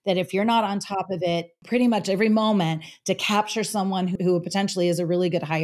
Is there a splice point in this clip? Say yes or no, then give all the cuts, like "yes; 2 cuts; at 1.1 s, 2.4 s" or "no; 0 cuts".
yes; 2 cuts; at 1.5 s, 4.2 s